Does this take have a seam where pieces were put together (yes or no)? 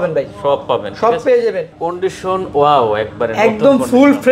yes